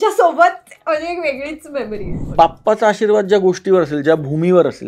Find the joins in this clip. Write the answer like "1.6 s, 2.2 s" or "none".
2.2 s